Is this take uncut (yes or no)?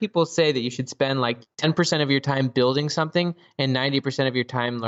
yes